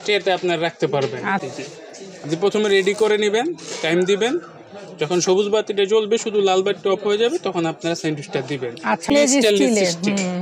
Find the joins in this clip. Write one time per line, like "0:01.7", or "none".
0:01.4
0:09.1